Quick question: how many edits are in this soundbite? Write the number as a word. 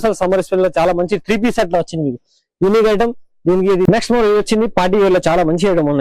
one